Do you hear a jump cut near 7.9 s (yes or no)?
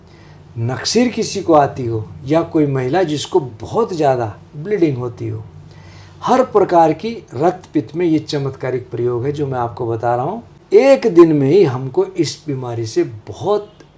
no